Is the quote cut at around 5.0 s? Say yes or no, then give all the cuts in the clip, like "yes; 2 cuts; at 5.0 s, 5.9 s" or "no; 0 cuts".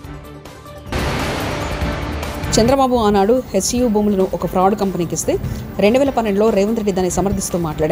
no; 2 cuts; at 0.9 s, 2.5 s